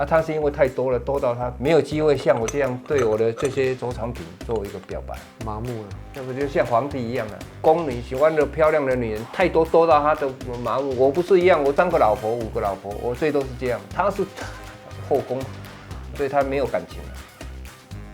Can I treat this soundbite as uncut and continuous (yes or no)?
no